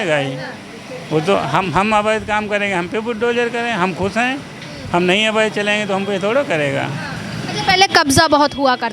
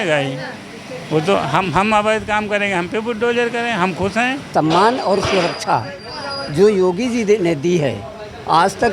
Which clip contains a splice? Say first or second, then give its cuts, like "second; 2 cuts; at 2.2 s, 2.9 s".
second; 1 cut; at 4.5 s